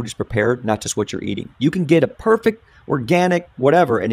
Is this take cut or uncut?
uncut